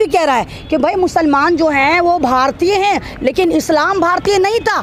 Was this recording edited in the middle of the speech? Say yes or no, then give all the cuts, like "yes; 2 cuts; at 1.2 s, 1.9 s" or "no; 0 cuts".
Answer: no; 0 cuts